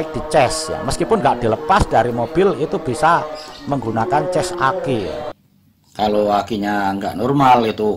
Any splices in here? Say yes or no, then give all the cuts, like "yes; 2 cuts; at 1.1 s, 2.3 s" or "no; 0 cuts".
yes; 1 cut; at 5.4 s